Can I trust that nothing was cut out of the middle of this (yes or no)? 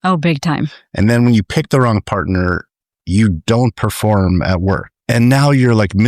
no